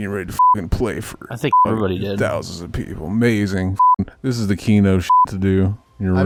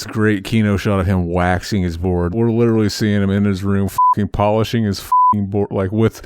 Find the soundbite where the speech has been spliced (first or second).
second